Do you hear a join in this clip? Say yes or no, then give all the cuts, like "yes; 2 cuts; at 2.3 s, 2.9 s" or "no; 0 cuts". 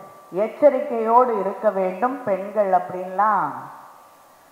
no; 0 cuts